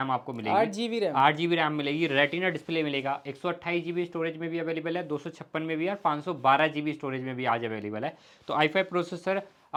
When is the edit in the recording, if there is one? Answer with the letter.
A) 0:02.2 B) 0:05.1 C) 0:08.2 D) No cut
D